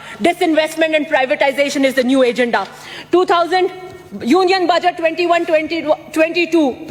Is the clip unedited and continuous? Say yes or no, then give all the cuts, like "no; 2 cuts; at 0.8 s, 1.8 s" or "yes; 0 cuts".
yes; 0 cuts